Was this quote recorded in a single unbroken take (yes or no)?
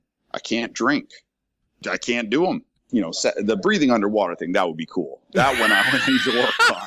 no